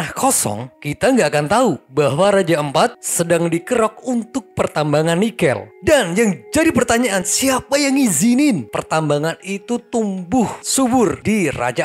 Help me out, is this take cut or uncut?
uncut